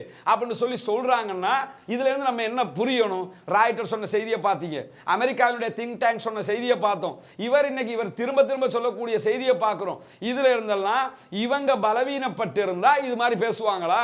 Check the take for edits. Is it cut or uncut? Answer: uncut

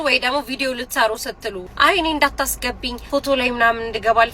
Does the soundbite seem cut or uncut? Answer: cut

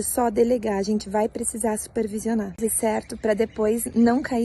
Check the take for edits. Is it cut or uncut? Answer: cut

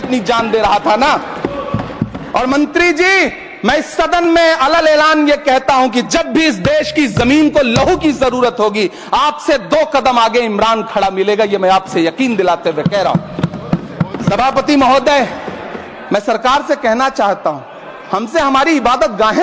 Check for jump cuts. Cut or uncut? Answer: uncut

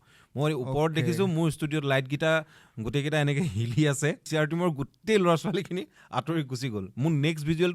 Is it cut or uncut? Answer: cut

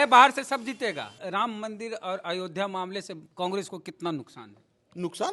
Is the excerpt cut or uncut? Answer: cut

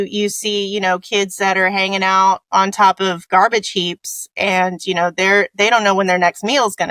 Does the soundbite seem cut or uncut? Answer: uncut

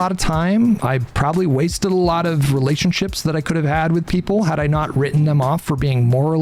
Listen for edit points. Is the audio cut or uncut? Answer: uncut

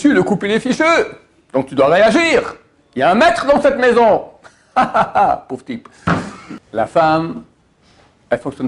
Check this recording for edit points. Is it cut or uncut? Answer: cut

